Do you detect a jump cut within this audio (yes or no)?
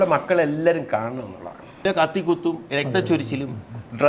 yes